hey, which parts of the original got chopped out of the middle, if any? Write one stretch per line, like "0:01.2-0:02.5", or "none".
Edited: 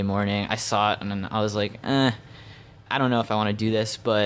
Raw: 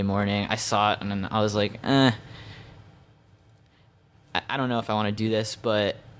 0:02.9-0:04.5